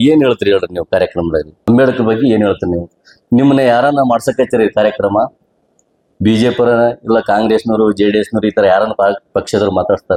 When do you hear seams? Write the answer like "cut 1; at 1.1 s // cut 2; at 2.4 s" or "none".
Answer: none